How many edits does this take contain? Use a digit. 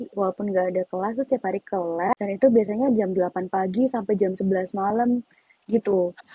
1